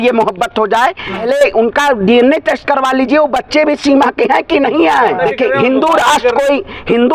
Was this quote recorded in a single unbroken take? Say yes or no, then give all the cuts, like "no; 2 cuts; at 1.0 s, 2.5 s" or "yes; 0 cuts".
no; 2 cuts; at 1.2 s, 5.2 s